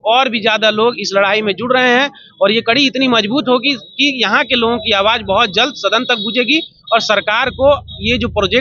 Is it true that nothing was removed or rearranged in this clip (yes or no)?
yes